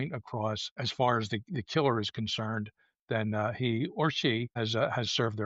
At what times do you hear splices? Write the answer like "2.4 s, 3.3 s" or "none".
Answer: 0.8 s, 4.5 s